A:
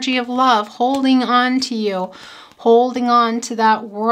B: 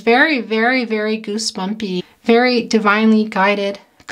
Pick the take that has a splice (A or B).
B